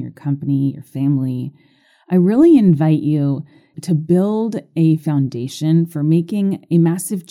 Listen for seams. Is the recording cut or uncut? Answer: cut